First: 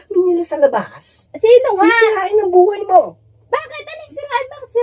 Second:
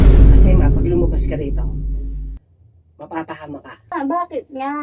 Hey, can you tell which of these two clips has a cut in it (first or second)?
second